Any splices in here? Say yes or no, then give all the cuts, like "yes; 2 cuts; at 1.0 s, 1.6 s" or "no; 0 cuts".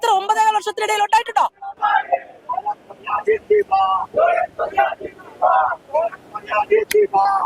no; 0 cuts